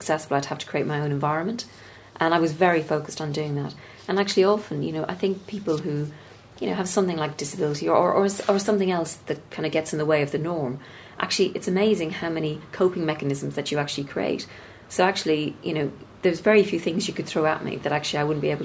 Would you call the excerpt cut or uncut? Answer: uncut